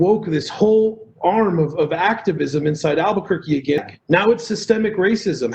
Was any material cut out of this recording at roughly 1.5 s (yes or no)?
no